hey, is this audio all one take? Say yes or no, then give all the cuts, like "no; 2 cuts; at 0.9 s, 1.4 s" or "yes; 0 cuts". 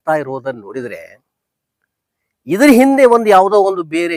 yes; 0 cuts